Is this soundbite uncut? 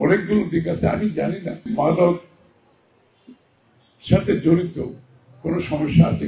no; 1 cut; at 1.7 s

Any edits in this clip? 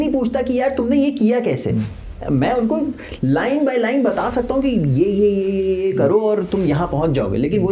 no; 0 cuts

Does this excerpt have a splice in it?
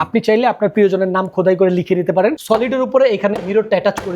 yes; 1 cut; at 2.4 s

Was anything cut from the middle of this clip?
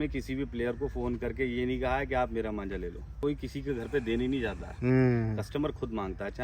yes; 1 cut; at 3.2 s

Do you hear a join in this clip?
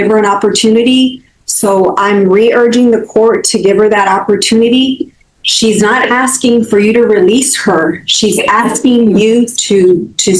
no; 0 cuts

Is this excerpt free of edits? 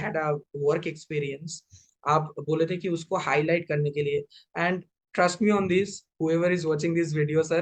yes; 0 cuts

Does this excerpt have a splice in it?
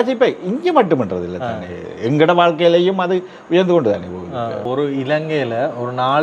yes; 1 cut; at 4.7 s

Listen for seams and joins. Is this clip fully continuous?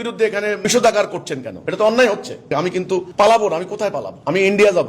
no; 1 cut; at 2.3 s

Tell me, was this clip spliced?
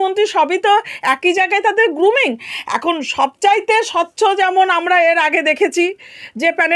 no; 0 cuts

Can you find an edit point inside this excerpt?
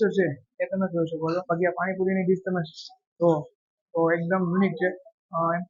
yes; 1 cut; at 1.4 s

